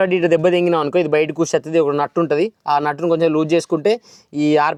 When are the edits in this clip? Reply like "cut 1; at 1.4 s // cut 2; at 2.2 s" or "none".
none